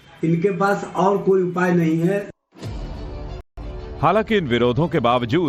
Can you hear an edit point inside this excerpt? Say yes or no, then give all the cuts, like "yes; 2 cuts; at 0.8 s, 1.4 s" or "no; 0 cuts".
no; 0 cuts